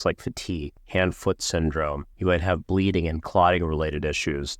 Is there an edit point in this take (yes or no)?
yes